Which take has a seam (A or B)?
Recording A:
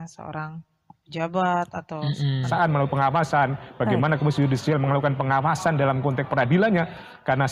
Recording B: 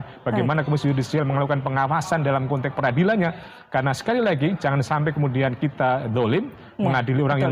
A